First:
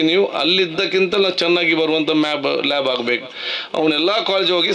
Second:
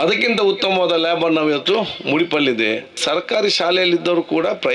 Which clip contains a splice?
second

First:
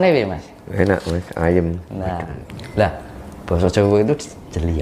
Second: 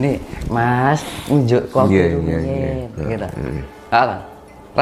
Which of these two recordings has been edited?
first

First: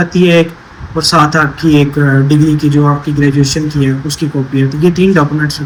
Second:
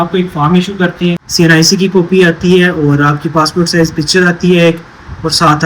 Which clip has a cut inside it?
second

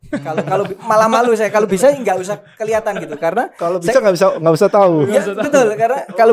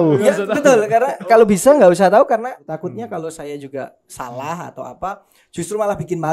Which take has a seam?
second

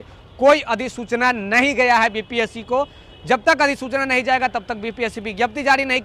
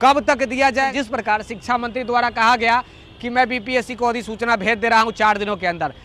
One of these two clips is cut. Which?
second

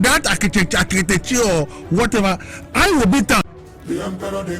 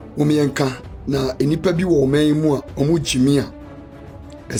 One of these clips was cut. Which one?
first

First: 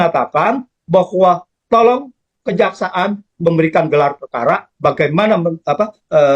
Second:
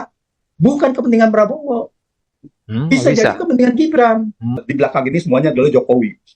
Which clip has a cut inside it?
second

